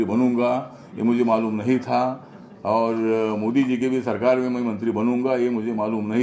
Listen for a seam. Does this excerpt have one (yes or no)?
no